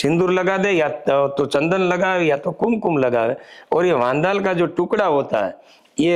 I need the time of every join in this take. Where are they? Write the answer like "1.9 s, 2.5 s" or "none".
none